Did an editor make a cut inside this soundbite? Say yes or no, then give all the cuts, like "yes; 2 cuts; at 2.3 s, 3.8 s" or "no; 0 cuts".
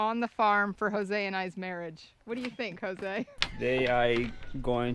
yes; 1 cut; at 3.3 s